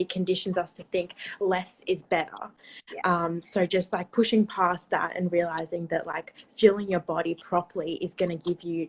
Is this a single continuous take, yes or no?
yes